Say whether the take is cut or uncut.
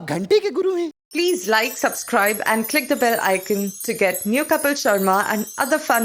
cut